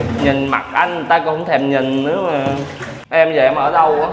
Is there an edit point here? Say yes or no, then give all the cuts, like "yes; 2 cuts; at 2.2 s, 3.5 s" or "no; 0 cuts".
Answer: yes; 1 cut; at 3.2 s